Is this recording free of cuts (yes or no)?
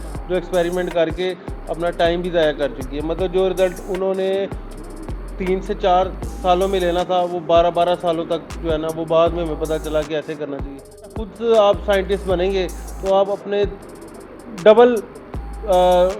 no